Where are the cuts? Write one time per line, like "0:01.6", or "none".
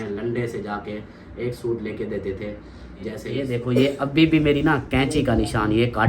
0:03.3